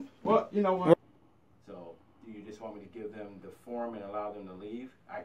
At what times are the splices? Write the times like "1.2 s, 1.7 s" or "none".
0.9 s